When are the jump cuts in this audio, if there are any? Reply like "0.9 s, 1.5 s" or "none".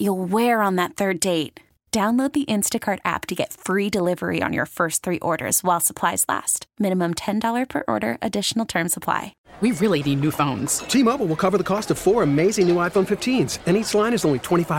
9.4 s